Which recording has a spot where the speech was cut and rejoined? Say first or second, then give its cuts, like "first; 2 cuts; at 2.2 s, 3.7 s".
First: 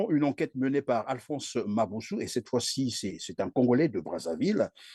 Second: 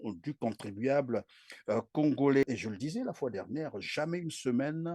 second; 1 cut; at 2.4 s